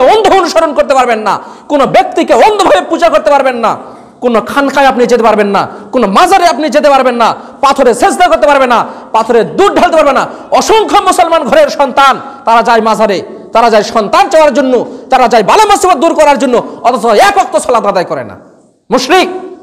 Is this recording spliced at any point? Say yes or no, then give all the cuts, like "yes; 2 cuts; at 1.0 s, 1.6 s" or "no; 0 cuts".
no; 0 cuts